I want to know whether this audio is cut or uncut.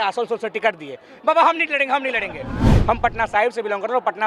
cut